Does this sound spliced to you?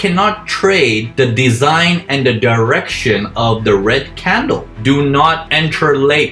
yes; 1 cut; at 4.7 s

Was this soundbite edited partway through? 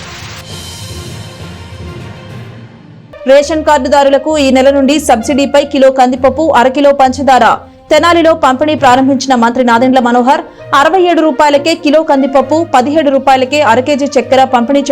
yes; 1 cut; at 2.9 s

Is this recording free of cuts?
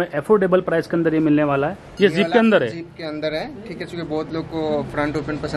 no; 1 cut; at 1.8 s

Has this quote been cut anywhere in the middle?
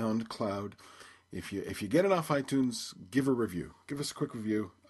no; 0 cuts

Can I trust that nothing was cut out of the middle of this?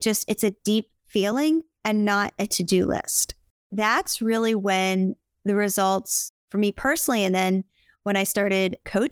no; 1 cut; at 1.7 s

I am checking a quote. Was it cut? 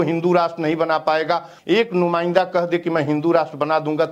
yes; 1 cut; at 1.5 s

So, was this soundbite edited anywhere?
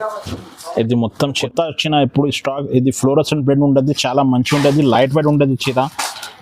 yes; 1 cut; at 1.4 s

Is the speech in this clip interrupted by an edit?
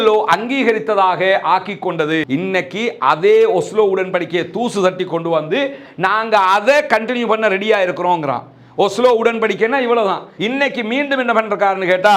yes; 2 cuts; at 2.2 s, 10.3 s

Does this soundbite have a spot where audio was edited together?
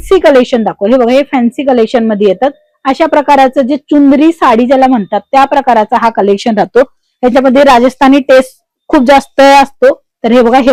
no; 0 cuts

